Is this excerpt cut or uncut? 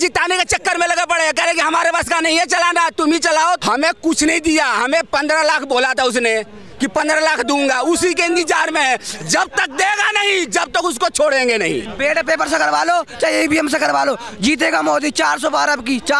cut